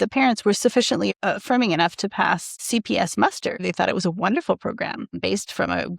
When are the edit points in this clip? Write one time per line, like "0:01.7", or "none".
0:01.1
0:02.6
0:03.6
0:05.2